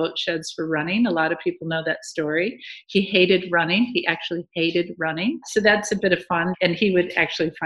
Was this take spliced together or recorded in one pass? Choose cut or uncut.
cut